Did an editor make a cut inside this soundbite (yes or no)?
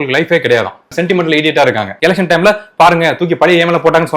yes